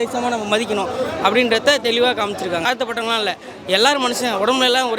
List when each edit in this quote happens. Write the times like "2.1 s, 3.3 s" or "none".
2.6 s